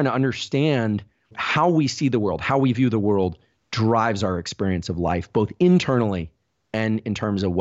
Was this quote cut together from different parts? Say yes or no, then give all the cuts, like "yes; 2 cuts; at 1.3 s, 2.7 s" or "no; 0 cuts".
yes; 1 cut; at 1.4 s